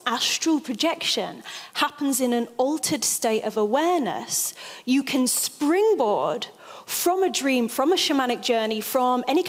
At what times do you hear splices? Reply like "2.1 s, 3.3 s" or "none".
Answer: none